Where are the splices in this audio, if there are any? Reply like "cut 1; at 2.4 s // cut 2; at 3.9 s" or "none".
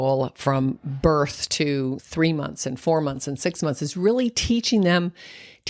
cut 1; at 2.0 s